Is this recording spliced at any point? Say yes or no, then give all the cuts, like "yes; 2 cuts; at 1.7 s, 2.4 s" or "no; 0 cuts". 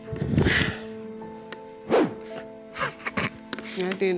no; 0 cuts